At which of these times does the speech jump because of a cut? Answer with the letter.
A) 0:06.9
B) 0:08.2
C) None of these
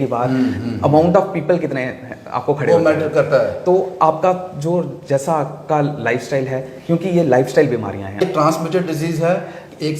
B